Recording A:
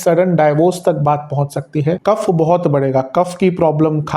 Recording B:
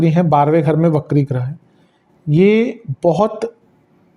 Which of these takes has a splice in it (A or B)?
A